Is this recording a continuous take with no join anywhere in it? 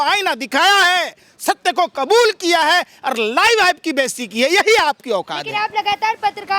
yes; 0 cuts

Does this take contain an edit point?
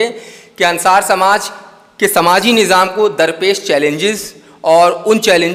no; 0 cuts

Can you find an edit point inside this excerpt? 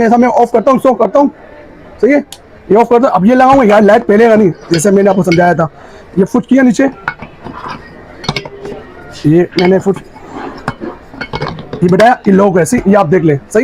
no; 0 cuts

